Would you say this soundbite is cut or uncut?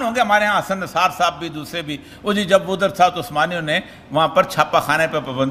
uncut